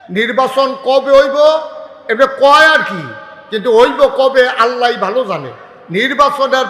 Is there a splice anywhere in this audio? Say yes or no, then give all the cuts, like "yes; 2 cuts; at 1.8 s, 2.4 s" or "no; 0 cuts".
no; 0 cuts